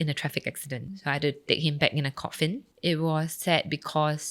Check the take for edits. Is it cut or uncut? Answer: cut